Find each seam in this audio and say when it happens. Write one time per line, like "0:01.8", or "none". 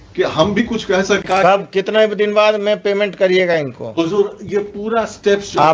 0:01.2